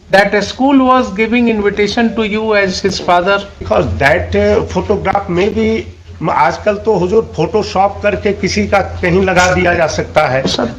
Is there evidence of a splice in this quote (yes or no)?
yes